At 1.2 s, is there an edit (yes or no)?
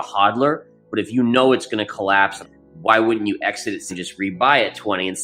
no